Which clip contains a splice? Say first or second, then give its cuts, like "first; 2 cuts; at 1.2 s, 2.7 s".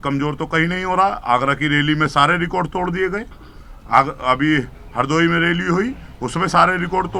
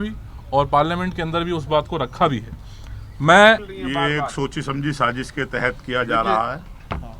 second; 1 cut; at 3.7 s